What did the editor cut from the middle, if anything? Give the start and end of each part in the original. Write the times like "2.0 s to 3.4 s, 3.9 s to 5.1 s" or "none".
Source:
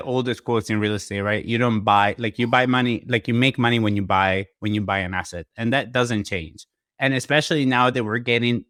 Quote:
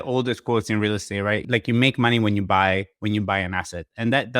1.4 s to 3.0 s